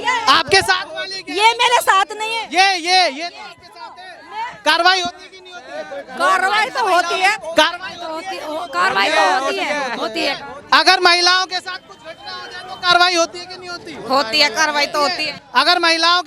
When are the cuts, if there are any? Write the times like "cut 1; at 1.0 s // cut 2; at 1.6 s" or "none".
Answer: cut 1; at 15.3 s